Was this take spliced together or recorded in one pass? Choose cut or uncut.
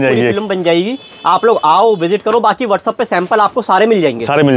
uncut